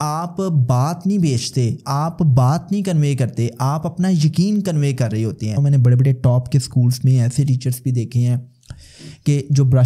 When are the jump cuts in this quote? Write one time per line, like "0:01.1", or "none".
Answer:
0:05.6